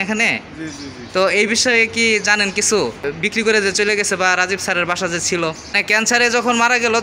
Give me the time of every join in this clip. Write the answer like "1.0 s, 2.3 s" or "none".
3.0 s, 5.8 s

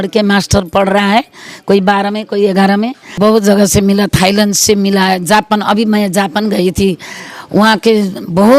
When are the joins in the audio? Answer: 3.0 s

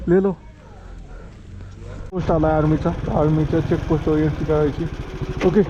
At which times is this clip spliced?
2.1 s

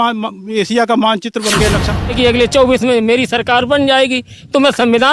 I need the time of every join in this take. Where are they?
2.1 s

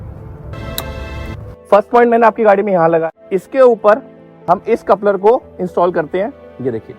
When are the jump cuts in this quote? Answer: 3.0 s

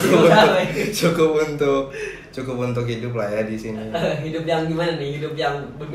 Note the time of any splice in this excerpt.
none

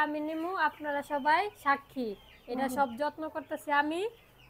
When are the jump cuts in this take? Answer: none

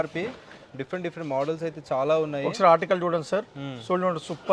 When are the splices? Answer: none

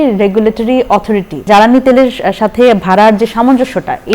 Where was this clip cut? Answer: 1.4 s

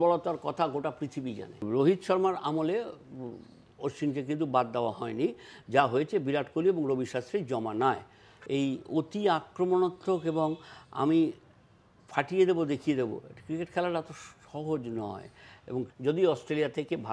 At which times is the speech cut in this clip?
1.6 s, 8.3 s, 15.8 s

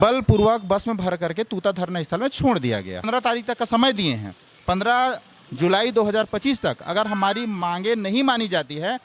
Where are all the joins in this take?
3.1 s

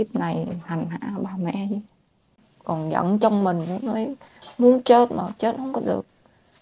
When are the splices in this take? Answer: 2.5 s

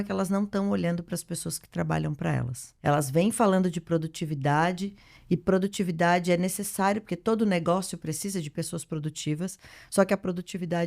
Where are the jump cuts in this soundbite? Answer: 2.6 s

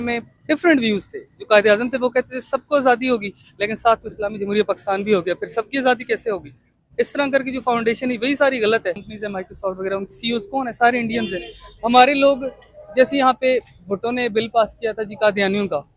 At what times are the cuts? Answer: none

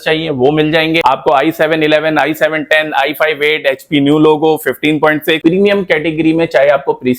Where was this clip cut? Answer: 1.0 s, 5.4 s

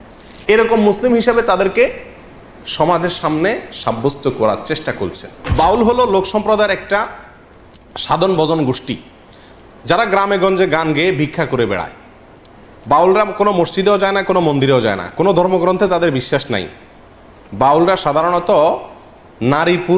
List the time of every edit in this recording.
5.5 s

